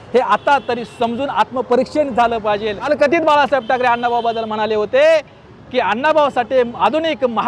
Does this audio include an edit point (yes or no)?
yes